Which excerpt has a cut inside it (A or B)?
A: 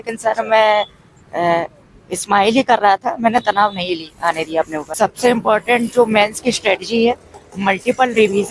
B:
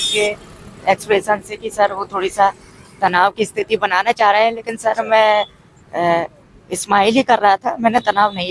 A